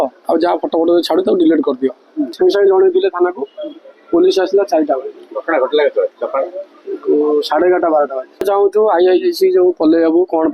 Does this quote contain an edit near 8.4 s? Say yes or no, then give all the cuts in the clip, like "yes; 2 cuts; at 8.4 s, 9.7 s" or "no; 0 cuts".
yes; 2 cuts; at 2.2 s, 8.4 s